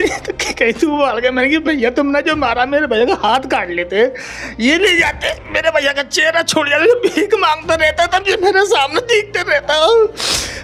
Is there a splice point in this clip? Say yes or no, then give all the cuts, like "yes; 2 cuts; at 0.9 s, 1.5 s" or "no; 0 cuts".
no; 0 cuts